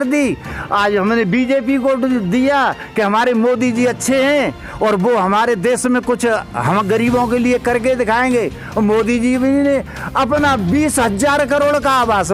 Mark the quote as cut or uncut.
uncut